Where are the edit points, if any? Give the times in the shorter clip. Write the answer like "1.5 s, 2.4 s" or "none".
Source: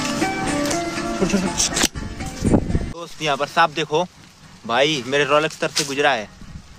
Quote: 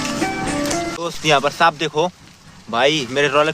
0.9 s